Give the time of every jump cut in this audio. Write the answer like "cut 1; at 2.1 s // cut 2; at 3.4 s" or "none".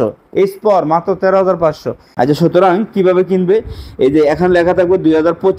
cut 1; at 2.1 s